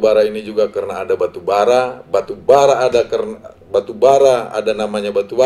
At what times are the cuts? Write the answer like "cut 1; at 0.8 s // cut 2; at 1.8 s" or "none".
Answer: none